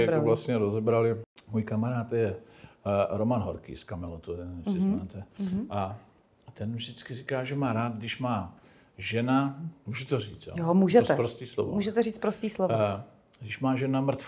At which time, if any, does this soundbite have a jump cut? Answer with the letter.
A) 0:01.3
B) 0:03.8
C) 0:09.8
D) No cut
A